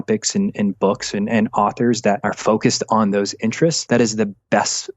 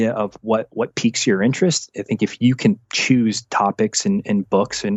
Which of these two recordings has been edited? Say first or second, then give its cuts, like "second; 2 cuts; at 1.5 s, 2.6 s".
first; 2 cuts; at 2.3 s, 3.8 s